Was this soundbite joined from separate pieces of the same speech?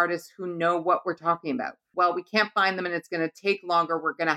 yes; 1 cut; at 1.9 s

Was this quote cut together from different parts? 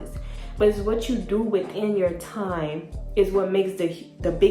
no; 0 cuts

